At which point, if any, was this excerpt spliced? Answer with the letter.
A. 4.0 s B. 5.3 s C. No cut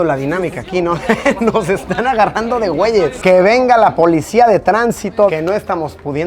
B